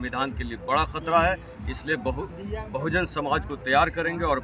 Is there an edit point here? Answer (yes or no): no